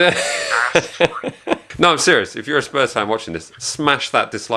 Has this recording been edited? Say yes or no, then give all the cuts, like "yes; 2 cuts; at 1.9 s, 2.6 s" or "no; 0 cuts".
yes; 1 cut; at 1.7 s